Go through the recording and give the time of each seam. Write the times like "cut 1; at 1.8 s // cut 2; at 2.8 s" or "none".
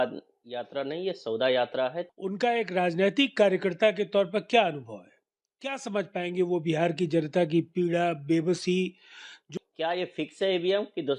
cut 1; at 2.1 s // cut 2; at 9.4 s